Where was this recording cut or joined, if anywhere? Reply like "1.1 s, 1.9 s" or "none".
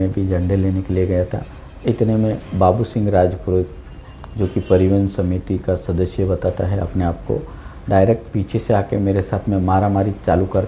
1.4 s